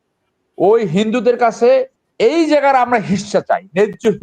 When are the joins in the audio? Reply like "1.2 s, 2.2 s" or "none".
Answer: 2.0 s